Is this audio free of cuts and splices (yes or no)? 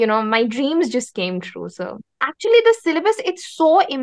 no